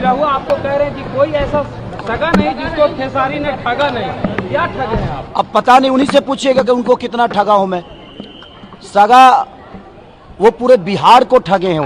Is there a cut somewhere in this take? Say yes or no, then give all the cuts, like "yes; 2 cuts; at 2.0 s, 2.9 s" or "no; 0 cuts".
no; 0 cuts